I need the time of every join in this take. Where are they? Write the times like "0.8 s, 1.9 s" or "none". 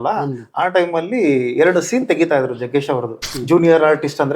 3.3 s